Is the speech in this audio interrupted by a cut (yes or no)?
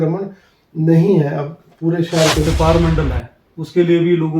yes